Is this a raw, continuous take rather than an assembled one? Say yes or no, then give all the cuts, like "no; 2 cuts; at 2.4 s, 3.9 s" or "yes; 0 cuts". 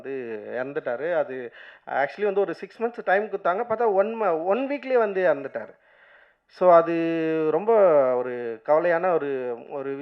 yes; 0 cuts